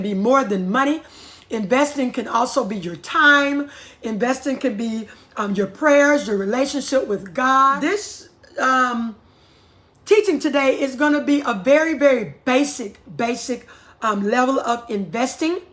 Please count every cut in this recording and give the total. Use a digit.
1